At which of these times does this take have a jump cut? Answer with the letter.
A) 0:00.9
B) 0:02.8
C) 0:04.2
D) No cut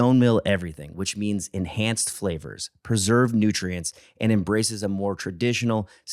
D